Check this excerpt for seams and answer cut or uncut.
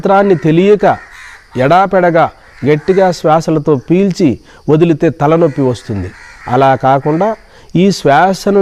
uncut